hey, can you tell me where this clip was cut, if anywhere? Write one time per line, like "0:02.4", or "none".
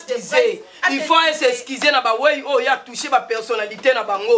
none